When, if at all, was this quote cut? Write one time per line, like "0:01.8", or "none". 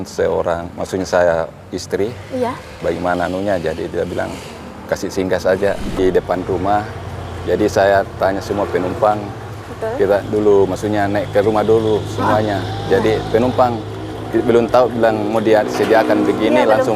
0:06.0